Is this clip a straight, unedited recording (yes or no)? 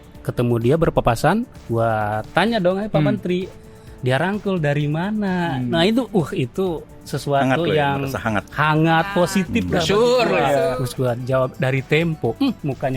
no